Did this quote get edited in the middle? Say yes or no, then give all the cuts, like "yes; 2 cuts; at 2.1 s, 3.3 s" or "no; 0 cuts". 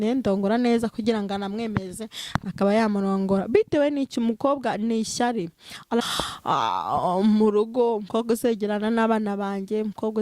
yes; 1 cut; at 6.1 s